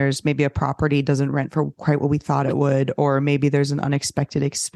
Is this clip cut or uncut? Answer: uncut